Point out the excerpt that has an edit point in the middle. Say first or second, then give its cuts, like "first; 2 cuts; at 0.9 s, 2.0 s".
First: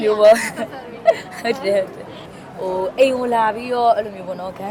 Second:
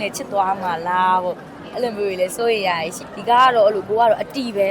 second; 1 cut; at 3.0 s